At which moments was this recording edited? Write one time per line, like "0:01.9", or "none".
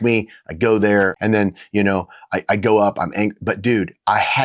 0:01.2